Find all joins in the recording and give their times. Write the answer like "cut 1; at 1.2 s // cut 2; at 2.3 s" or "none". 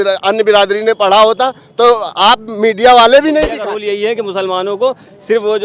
cut 1; at 3.7 s